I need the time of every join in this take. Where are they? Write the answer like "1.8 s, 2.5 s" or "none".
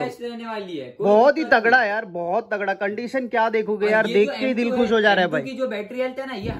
none

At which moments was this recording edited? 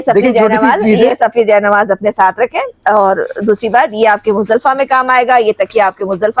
none

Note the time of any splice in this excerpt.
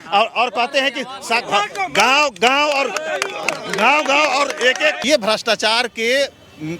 5.0 s

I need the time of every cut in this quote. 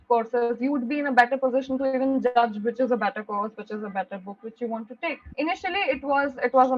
5.2 s

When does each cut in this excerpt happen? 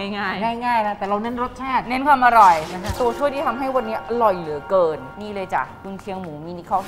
3.0 s, 5.1 s

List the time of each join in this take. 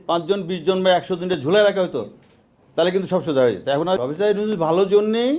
4.0 s

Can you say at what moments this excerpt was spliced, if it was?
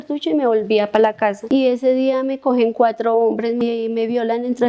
1.4 s, 3.6 s

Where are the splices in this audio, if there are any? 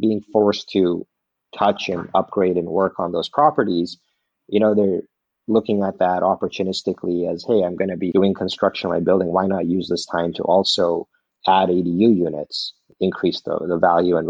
8.1 s

